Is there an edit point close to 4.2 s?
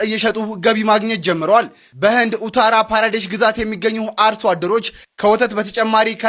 no; 0 cuts

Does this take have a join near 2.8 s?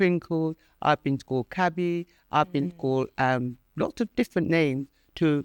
no; 0 cuts

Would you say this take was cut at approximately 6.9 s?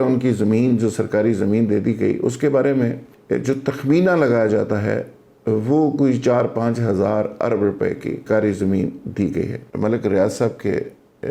no; 3 cuts; at 3.1 s, 8.2 s, 9.6 s

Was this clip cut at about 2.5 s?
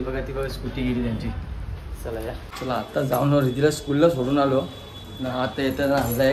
yes; 1 cut; at 2.5 s

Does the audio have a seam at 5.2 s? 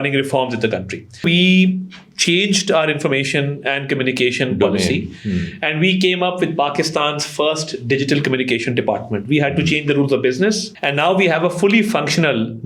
no; 2 cuts; at 1.2 s, 10.7 s

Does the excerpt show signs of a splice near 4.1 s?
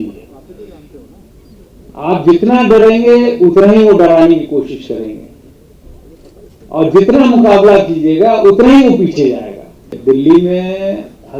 no; 1 cut; at 9.9 s

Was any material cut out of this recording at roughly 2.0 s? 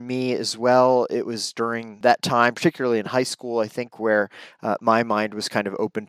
yes; 1 cut; at 2.0 s

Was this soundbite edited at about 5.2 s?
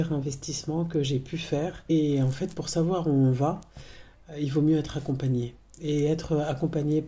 no; 1 cut; at 1.9 s

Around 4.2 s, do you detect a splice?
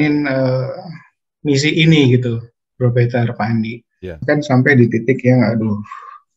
yes; 1 cut; at 4.2 s

